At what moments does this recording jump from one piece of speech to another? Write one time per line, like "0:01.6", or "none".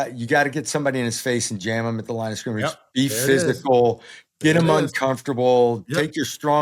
none